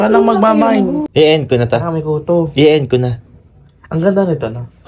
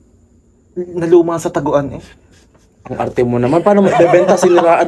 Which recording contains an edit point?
first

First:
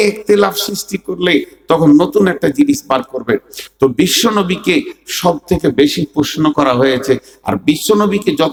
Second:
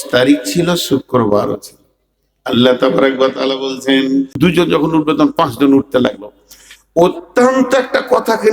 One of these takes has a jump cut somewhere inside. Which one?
second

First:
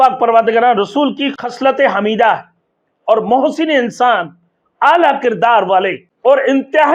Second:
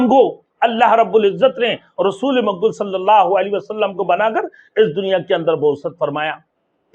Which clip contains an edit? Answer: first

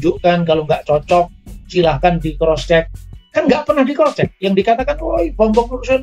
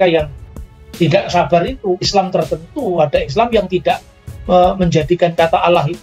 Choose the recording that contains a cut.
second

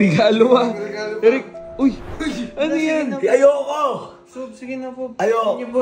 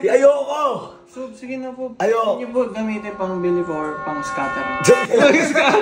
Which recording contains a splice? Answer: first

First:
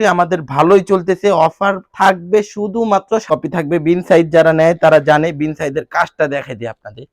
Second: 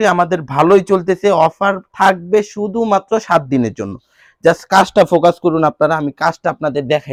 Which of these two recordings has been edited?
first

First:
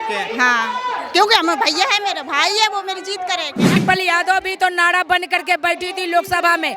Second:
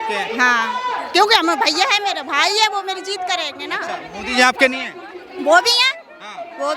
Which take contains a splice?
first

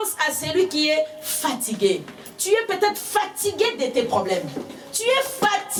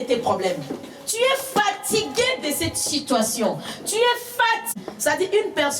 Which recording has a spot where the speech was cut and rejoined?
second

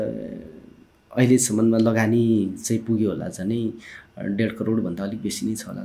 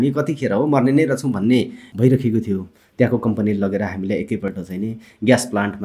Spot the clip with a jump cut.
second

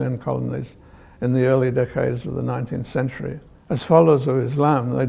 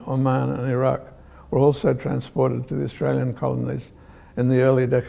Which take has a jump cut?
first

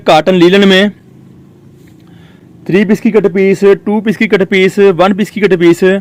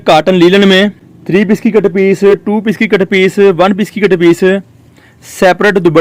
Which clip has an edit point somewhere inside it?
second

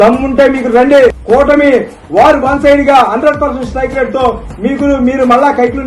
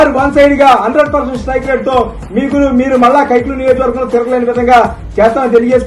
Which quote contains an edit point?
first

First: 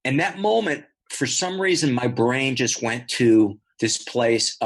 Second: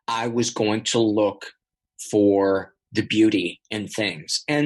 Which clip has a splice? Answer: first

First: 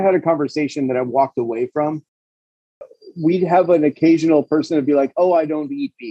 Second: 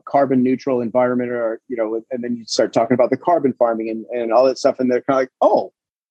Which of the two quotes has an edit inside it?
first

